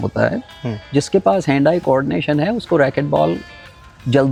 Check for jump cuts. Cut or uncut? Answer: uncut